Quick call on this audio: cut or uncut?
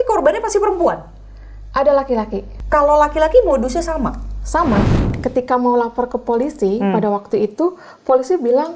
cut